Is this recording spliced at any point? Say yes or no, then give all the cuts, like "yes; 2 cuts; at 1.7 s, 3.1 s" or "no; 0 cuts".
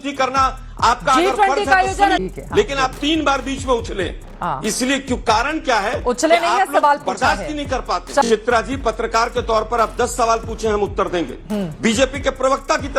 yes; 2 cuts; at 2.2 s, 8.2 s